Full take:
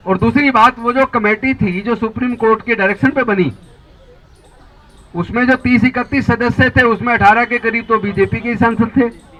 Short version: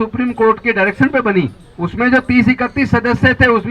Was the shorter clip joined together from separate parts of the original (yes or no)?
yes